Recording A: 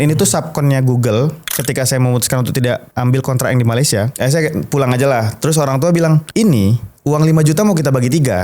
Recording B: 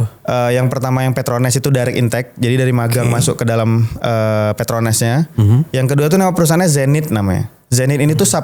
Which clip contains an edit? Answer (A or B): A